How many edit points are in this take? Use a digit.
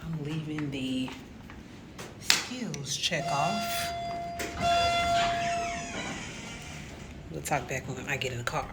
0